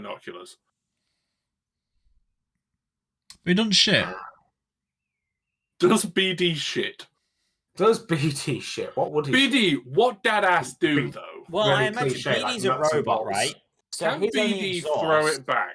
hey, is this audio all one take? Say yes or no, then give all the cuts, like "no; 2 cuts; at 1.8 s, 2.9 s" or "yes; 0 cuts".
yes; 0 cuts